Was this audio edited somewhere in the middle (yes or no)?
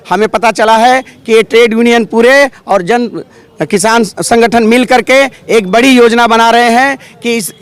no